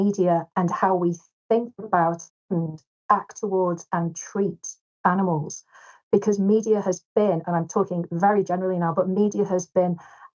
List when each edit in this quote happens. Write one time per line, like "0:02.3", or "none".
0:02.3